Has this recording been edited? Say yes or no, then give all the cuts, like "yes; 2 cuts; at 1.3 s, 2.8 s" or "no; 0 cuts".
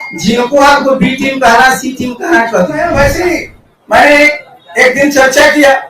yes; 1 cut; at 2.9 s